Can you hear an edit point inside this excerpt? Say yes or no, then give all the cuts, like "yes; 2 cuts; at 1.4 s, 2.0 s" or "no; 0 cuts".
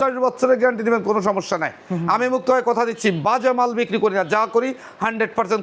no; 0 cuts